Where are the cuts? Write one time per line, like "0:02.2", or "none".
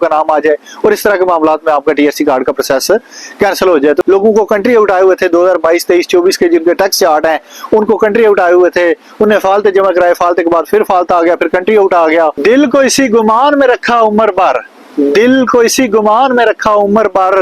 0:04.0
0:12.4